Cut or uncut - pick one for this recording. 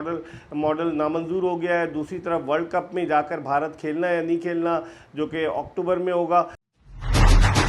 cut